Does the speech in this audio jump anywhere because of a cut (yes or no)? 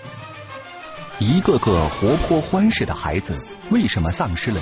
yes